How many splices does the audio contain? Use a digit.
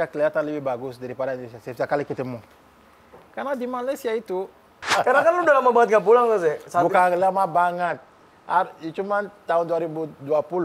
1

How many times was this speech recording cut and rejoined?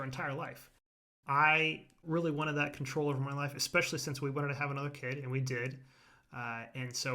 2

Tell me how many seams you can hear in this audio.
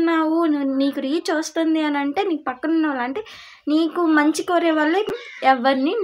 1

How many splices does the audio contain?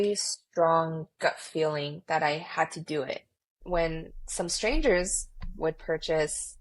2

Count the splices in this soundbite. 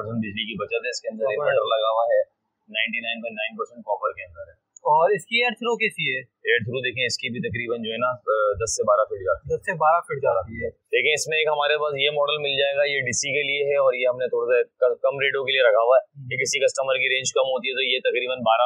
1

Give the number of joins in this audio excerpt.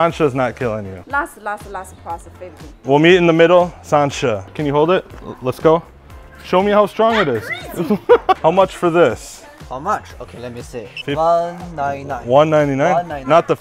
3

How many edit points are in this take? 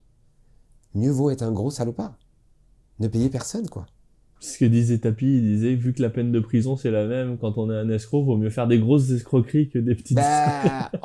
0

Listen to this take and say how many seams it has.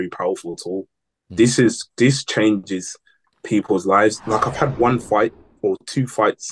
1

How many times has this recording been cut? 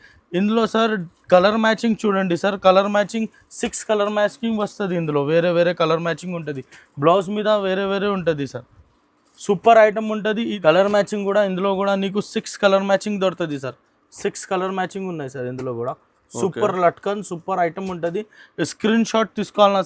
1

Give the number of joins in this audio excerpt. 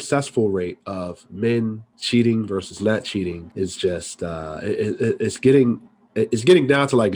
1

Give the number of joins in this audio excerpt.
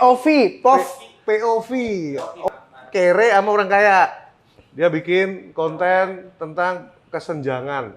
1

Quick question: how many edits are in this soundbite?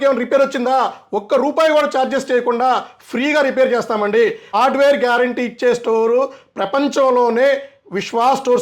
1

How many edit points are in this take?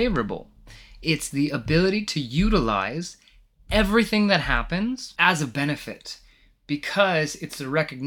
1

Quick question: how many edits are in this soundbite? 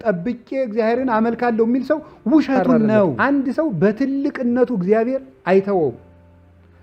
1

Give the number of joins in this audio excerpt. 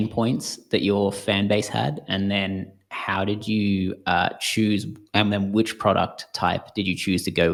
0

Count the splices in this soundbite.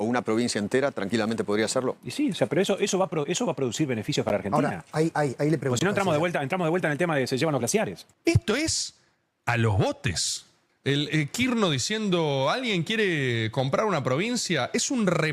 1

